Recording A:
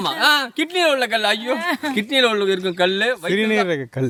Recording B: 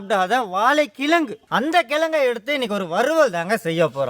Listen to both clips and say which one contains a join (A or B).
B